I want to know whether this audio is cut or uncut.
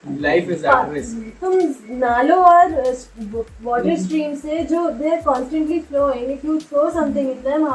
uncut